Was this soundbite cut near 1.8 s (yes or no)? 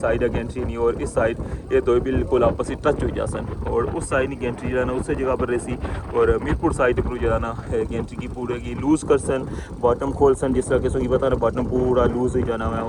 no